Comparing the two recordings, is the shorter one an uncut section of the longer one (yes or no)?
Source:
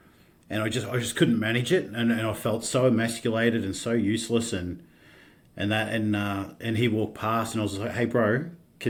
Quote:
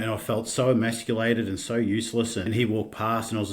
no